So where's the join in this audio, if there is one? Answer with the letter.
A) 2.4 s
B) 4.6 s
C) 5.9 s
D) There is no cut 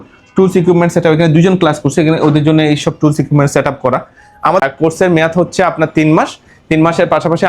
B